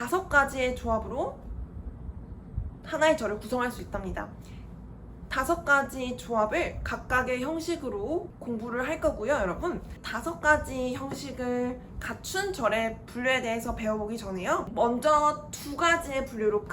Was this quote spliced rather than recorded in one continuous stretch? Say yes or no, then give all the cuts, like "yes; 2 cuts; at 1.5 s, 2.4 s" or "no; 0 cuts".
yes; 3 cuts; at 8.3 s, 10.0 s, 14.7 s